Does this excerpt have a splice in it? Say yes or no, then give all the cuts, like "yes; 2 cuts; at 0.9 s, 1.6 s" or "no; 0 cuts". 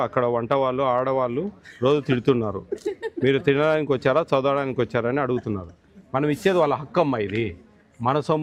no; 0 cuts